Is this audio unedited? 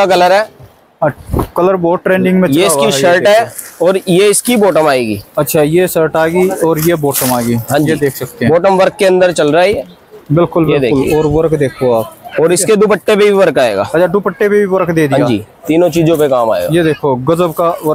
yes; 0 cuts

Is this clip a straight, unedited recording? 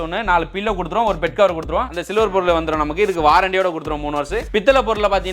no; 1 cut; at 1.9 s

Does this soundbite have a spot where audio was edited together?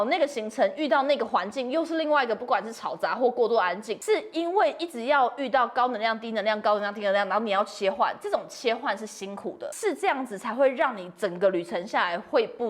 yes; 2 cuts; at 3.9 s, 9.7 s

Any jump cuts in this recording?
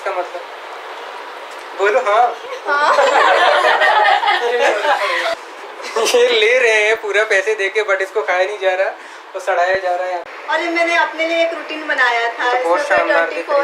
yes; 2 cuts; at 5.3 s, 10.3 s

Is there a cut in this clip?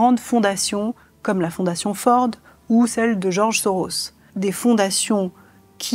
yes; 1 cut; at 4.2 s

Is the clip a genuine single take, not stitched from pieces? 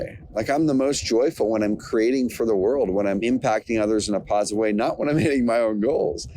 no; 1 cut; at 3.2 s

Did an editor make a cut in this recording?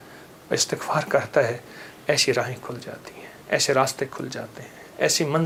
no; 0 cuts

